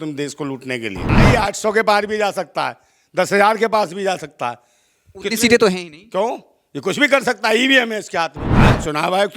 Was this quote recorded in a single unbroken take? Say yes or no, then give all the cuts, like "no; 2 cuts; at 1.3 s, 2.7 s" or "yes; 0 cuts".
no; 2 cuts; at 1.2 s, 8.5 s